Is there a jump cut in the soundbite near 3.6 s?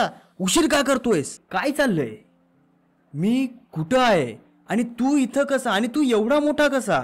no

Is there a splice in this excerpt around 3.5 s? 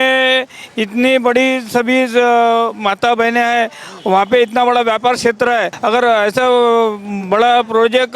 no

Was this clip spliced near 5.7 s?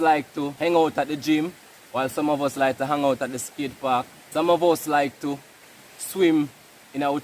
no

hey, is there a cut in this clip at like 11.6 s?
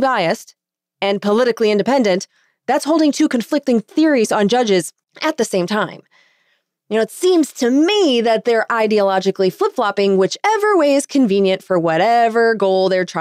no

